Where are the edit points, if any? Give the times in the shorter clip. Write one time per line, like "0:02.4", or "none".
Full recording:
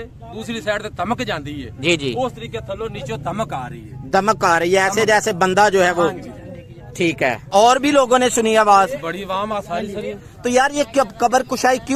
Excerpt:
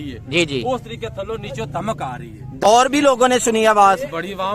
0:02.6